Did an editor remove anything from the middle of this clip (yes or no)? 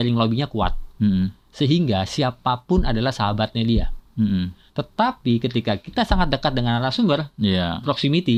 no